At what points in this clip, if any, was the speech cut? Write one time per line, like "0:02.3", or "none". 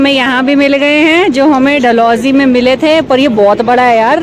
none